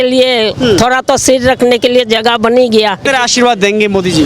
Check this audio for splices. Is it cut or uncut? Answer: cut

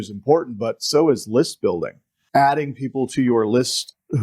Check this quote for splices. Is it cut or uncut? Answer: cut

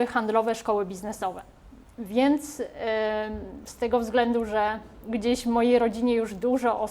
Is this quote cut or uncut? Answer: uncut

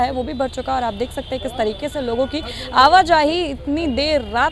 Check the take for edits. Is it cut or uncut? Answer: uncut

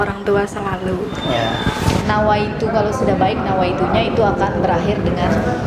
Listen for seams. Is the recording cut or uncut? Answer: cut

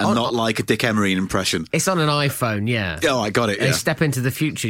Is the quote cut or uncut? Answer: uncut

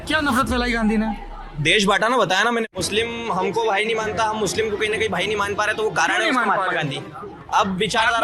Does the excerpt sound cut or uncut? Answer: cut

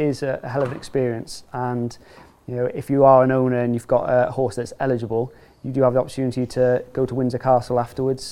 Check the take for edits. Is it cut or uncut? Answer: uncut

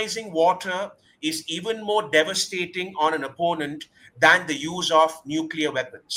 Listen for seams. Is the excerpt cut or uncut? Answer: uncut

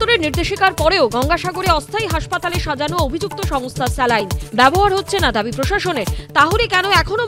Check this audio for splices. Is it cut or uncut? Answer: uncut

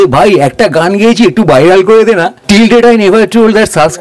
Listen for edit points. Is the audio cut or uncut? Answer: cut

